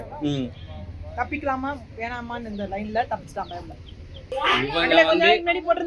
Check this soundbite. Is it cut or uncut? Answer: cut